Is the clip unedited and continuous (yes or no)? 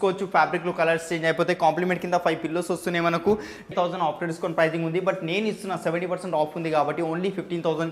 no